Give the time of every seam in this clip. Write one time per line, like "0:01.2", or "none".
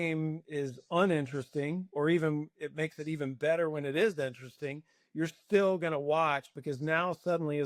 none